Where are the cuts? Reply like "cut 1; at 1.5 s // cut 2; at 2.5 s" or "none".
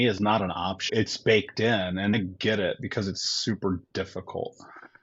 cut 1; at 0.9 s // cut 2; at 2.2 s